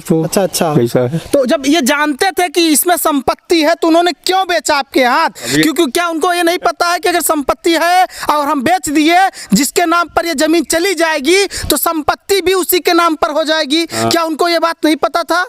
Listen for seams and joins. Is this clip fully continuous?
yes; 0 cuts

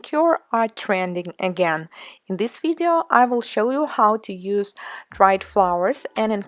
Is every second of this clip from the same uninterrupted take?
yes; 0 cuts

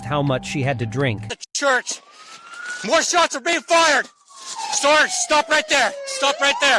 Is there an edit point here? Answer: yes; 1 cut; at 1.3 s

